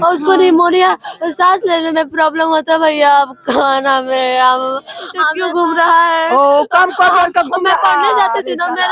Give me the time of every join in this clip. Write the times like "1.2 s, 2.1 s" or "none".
5.3 s